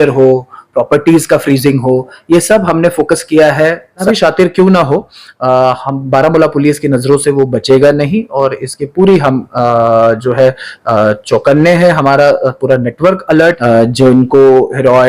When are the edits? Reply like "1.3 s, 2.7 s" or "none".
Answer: 4.0 s, 13.6 s